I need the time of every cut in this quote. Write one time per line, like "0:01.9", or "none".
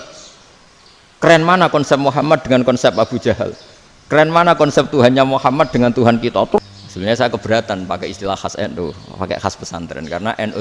0:06.6